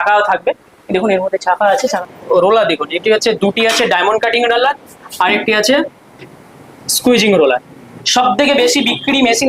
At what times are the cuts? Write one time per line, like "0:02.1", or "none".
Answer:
0:01.9
0:07.9